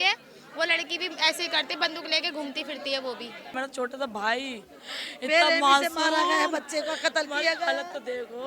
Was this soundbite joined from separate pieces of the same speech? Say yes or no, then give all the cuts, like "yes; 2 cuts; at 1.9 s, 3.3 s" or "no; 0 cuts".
yes; 1 cut; at 3.5 s